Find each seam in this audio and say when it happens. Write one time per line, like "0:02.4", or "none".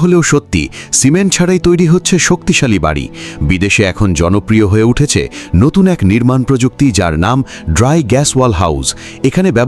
none